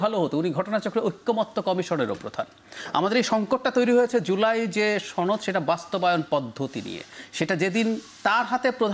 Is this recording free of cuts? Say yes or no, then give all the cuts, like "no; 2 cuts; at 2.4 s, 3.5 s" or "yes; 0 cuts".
yes; 0 cuts